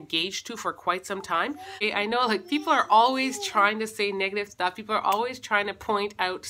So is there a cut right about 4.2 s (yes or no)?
no